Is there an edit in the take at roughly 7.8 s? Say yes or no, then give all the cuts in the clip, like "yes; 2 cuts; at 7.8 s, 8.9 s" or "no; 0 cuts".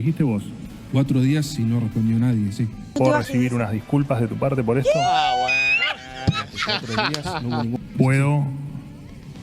yes; 1 cut; at 7.8 s